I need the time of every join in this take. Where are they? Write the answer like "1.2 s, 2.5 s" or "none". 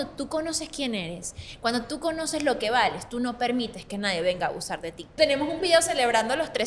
5.1 s

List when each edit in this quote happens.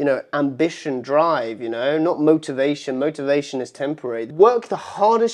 4.3 s

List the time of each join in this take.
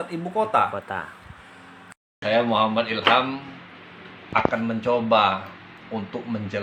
1.8 s

